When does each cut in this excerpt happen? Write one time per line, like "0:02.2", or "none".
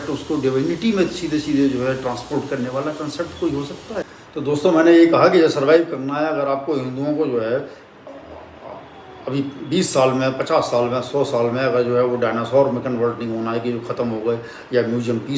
0:04.2